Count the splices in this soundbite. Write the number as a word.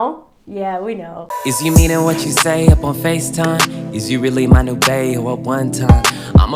one